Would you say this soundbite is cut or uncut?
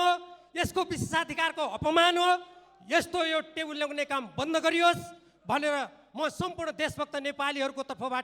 uncut